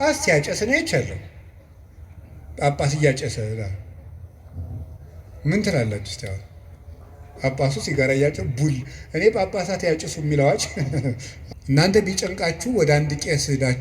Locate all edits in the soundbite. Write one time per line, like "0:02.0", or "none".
0:11.3